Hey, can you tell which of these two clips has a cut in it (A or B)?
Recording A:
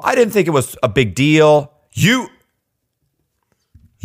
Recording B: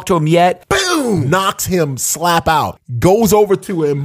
B